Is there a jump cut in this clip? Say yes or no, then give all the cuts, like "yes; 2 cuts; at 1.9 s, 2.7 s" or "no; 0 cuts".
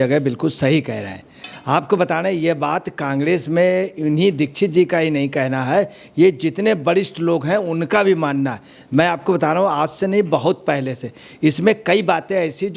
no; 0 cuts